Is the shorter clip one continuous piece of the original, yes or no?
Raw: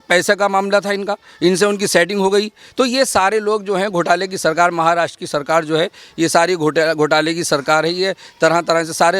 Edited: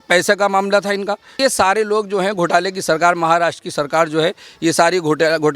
no